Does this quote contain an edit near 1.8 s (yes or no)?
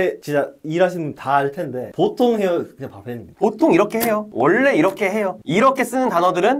no